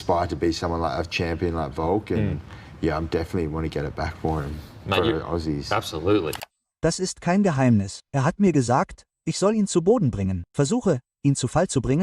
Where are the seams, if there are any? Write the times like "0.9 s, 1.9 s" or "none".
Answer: 6.4 s